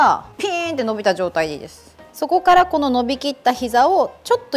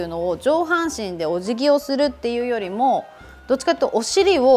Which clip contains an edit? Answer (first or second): first